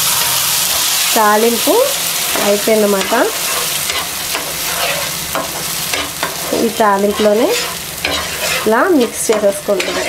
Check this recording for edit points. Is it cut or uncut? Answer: uncut